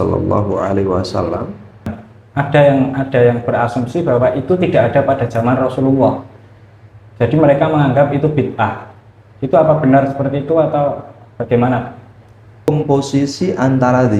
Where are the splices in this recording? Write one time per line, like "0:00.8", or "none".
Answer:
0:02.0
0:12.7